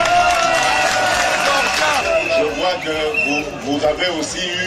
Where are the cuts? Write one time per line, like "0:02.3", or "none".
0:02.0